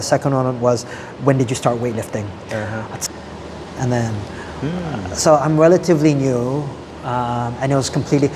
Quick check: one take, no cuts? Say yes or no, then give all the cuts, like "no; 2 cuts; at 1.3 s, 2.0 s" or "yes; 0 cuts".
no; 1 cut; at 3.0 s